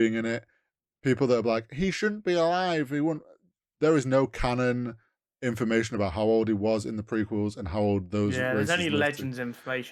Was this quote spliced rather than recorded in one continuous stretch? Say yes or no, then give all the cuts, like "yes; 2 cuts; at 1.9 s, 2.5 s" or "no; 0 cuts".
no; 0 cuts